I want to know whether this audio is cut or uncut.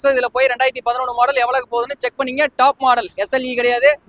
uncut